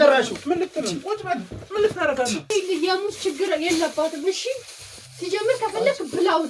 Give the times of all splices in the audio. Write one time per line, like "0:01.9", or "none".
0:02.5

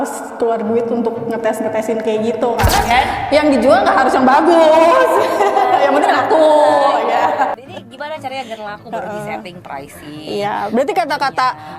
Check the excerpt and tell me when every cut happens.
0:02.9

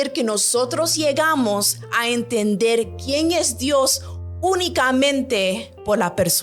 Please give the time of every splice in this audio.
none

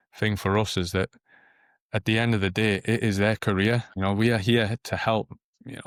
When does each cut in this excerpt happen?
none

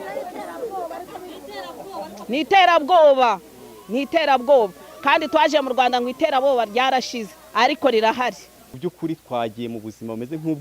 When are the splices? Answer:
0:08.6

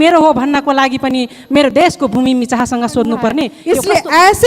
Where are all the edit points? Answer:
0:03.6

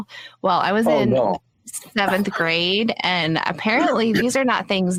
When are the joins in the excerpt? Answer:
none

